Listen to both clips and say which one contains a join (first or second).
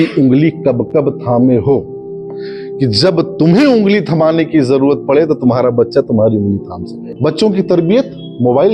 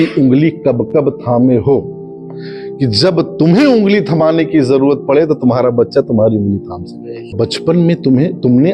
first